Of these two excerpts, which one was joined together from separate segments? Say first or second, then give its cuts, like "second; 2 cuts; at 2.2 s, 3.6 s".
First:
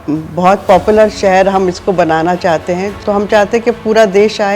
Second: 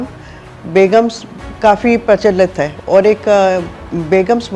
first; 1 cut; at 2.9 s